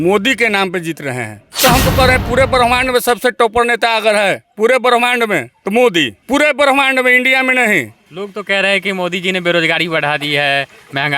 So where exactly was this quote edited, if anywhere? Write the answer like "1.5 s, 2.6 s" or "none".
1.6 s, 5.5 s, 6.2 s, 8.0 s